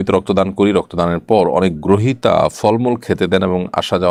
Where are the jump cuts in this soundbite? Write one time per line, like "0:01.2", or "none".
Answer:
none

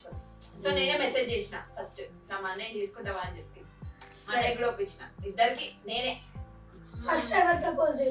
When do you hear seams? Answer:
0:06.7

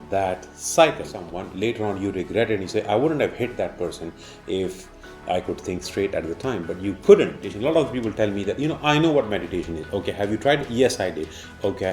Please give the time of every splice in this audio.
0:01.4
0:07.4

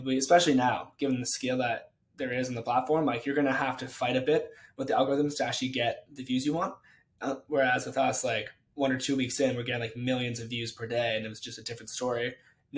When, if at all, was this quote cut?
none

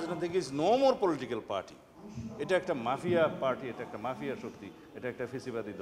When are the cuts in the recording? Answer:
none

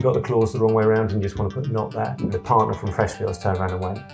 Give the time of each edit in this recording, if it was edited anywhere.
0:02.2

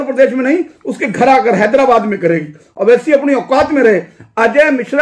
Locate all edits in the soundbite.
none

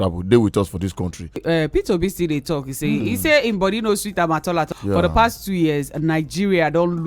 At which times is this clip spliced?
0:01.4
0:04.7

